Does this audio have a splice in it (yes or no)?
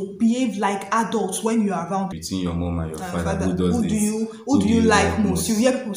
yes